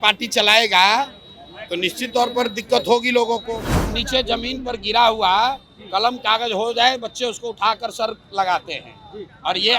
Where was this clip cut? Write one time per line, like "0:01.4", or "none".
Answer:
0:03.8

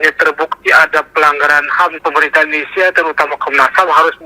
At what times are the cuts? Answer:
0:02.0

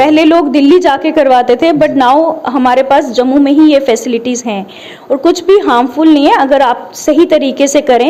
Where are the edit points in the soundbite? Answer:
none

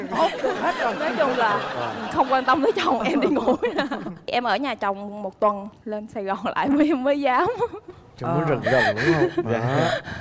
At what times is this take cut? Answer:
none

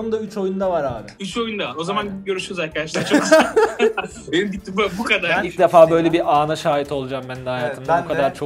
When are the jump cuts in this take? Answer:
0:05.5

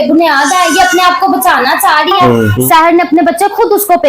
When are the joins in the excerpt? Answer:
0:02.5

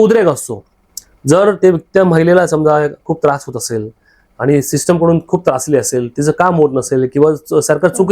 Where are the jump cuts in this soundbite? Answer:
none

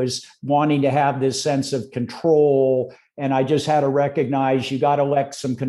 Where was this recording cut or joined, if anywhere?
none

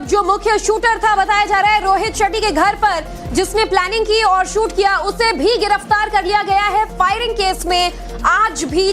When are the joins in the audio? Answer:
0:06.0

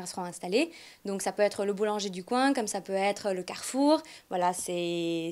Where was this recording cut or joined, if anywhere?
0:01.8

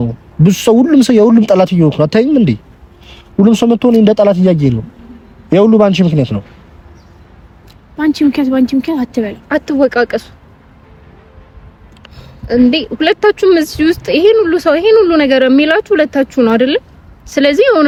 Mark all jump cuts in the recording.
none

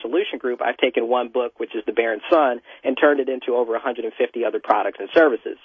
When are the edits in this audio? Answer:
none

